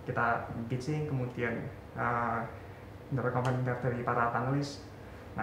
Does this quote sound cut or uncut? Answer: uncut